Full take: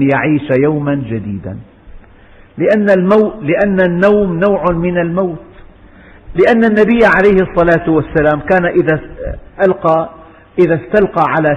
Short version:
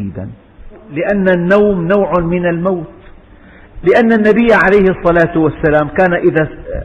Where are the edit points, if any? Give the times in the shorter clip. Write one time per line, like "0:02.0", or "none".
0:00.9